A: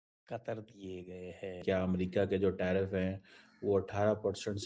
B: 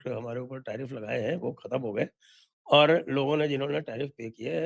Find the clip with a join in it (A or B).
A